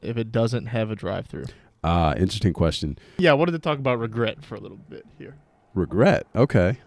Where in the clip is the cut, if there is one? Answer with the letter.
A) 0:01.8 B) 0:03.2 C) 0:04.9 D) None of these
B